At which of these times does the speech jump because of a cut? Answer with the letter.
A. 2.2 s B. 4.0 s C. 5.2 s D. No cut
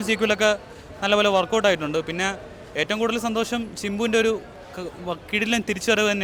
D